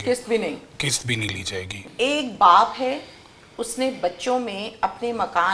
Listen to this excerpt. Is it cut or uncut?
cut